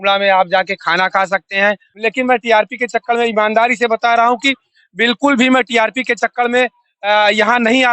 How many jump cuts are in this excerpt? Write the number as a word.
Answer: one